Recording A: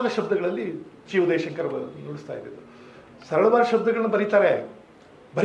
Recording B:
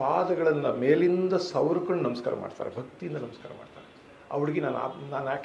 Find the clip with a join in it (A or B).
A